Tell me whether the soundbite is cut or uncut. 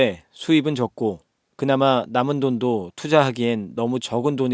uncut